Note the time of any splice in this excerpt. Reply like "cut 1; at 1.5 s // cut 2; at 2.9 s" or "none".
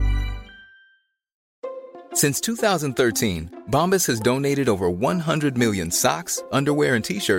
cut 1; at 1.4 s